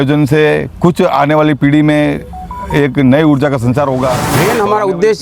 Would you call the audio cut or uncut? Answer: cut